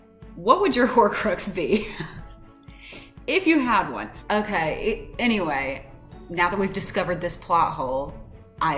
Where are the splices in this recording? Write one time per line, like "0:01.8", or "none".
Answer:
0:04.1